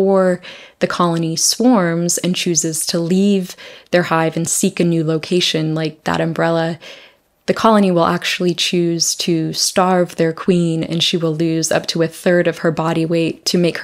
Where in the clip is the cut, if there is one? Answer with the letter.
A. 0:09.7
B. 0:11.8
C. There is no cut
C